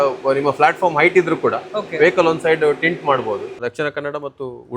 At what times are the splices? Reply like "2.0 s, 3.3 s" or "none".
3.5 s